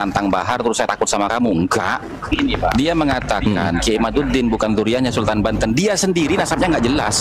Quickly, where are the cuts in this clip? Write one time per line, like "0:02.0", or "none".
0:02.3